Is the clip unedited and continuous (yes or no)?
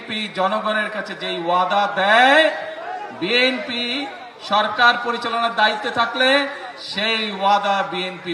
yes